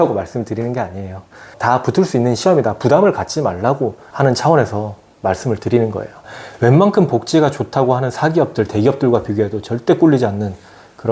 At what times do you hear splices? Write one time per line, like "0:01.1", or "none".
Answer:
0:06.2